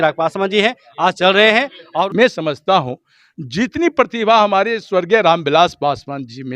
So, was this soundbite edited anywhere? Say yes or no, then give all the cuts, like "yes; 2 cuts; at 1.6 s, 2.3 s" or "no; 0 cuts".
yes; 1 cut; at 2.1 s